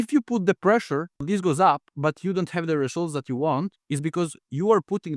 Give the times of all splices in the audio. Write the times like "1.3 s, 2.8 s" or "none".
1.2 s, 1.9 s